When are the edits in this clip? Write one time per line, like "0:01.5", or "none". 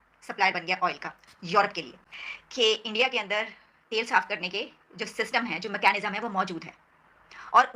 none